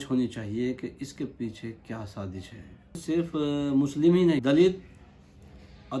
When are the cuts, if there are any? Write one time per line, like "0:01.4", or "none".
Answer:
0:03.0
0:04.4